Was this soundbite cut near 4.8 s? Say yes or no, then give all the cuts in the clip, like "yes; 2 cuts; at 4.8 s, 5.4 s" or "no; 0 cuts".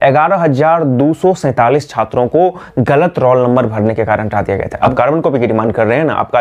yes; 1 cut; at 4.8 s